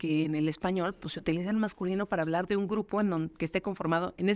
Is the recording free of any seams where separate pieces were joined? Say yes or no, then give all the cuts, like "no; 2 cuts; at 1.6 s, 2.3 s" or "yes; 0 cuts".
yes; 0 cuts